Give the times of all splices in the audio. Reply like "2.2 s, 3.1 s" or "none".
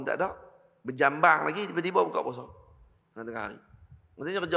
none